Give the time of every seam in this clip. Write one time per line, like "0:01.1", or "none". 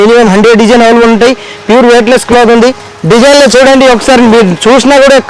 none